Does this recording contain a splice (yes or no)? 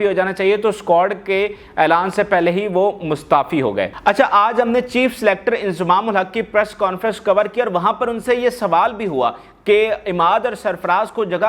no